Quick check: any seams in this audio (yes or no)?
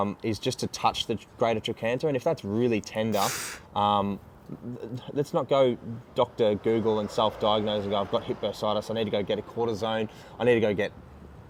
no